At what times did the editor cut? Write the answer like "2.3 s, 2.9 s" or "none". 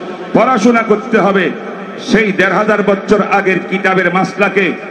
none